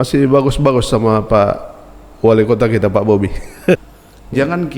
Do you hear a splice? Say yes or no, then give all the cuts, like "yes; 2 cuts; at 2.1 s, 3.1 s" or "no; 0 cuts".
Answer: yes; 1 cut; at 3.8 s